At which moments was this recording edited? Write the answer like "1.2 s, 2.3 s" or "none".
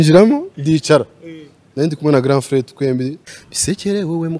3.2 s